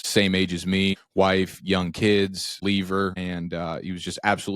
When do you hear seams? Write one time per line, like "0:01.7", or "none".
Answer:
0:01.0
0:02.6
0:03.2